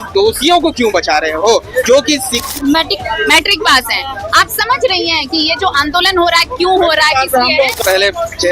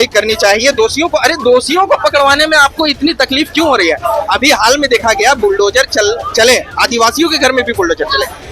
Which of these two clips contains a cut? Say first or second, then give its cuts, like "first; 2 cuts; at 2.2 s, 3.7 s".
first; 2 cuts; at 2.4 s, 7.8 s